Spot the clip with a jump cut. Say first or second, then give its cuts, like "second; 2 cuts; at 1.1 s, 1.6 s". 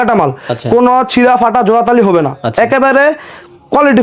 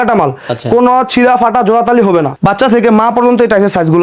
second; 1 cut; at 2.3 s